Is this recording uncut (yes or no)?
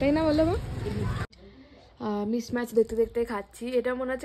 no